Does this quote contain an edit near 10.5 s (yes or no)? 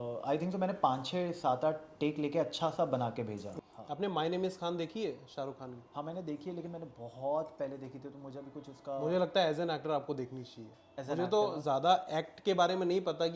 no